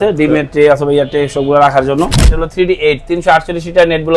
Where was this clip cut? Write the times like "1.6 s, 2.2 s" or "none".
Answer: 2.2 s